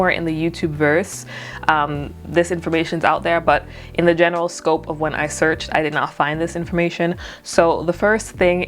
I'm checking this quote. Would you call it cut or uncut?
uncut